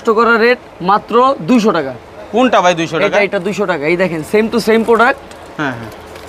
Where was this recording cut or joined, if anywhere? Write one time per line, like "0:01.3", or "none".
none